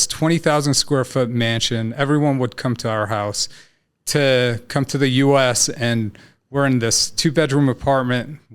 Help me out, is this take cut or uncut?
uncut